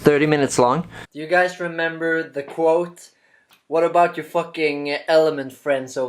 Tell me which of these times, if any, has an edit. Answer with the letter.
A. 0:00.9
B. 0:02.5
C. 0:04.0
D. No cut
A